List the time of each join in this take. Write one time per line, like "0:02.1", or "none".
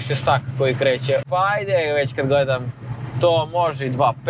0:01.2